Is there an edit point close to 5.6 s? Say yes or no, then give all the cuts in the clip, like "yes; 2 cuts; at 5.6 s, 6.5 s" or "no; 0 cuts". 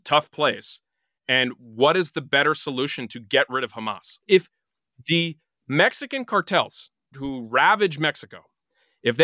no; 2 cuts; at 4.1 s, 7.1 s